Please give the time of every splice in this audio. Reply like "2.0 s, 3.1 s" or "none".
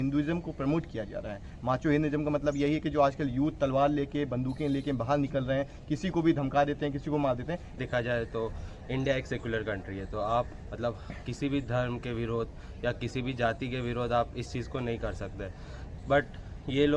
7.8 s

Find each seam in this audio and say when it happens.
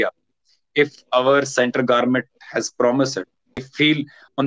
3.6 s

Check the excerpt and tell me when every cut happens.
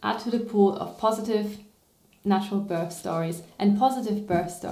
none

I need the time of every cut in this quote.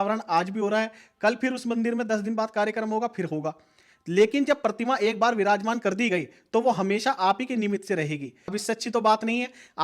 8.6 s

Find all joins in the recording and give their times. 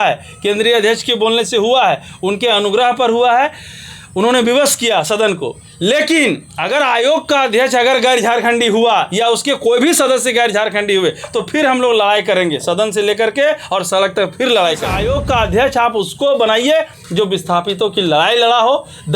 15.0 s

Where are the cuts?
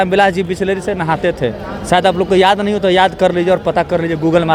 none

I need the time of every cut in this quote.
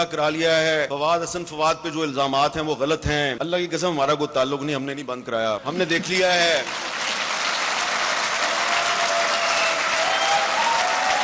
0.9 s, 3.4 s, 5.6 s

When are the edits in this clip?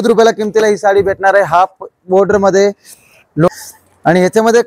3.5 s

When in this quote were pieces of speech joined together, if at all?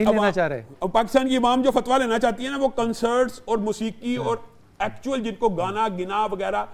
none

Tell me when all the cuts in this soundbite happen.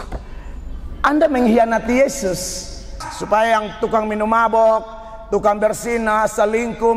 3.0 s

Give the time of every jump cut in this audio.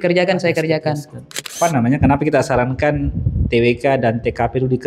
1.5 s

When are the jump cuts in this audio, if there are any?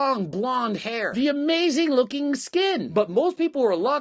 2.9 s

